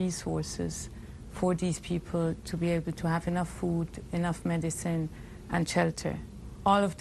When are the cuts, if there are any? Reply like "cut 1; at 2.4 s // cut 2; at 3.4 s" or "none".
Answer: none